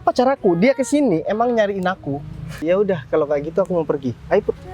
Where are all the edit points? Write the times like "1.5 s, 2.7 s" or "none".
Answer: 2.6 s